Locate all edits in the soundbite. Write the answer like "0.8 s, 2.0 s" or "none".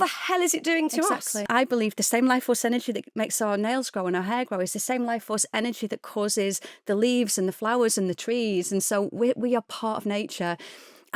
1.5 s